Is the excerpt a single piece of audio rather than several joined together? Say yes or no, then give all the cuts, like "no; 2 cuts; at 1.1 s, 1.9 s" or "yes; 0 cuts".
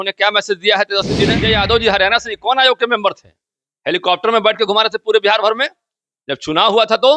no; 1 cut; at 1.4 s